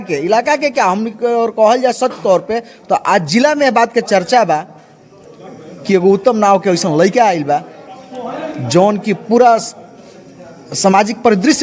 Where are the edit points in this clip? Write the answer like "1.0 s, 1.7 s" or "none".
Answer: none